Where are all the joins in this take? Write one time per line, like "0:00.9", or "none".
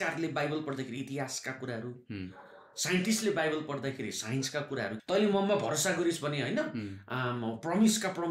0:05.0